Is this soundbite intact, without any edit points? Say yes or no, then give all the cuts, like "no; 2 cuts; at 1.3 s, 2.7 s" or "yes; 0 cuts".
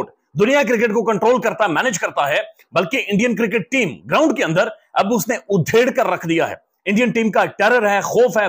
yes; 0 cuts